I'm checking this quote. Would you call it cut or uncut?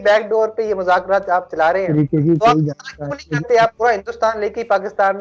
cut